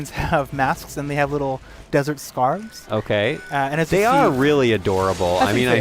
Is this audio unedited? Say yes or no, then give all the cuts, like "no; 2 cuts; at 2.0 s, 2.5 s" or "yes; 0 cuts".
yes; 0 cuts